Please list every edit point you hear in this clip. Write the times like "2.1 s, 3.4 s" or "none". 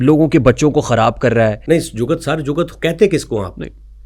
1.6 s